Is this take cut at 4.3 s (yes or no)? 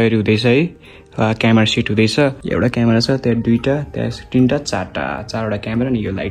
no